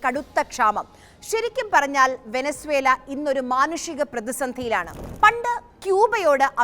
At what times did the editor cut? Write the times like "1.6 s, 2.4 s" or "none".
5.0 s